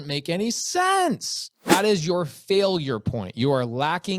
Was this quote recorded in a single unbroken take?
no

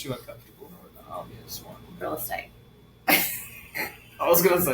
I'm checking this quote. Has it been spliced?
yes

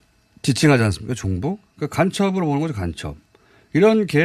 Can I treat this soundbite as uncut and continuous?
yes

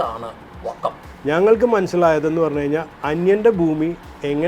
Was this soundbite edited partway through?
yes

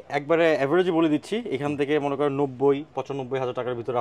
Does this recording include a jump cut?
no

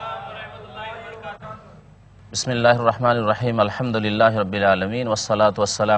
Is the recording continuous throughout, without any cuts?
no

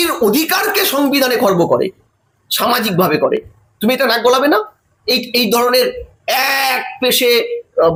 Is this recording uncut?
yes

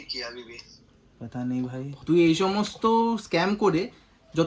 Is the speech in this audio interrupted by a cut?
yes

